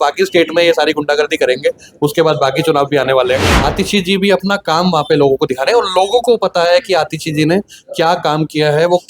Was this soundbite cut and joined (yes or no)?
yes